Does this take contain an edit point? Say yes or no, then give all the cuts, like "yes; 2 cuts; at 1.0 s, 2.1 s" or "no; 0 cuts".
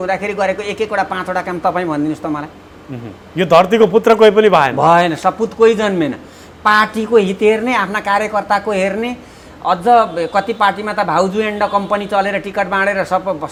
no; 0 cuts